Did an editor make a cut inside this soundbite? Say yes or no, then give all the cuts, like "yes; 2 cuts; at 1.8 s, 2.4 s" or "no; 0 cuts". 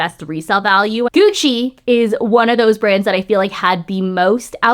yes; 1 cut; at 1.1 s